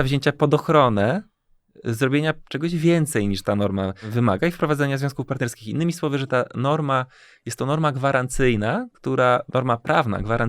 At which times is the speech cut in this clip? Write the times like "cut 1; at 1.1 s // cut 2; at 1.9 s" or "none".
cut 1; at 4.1 s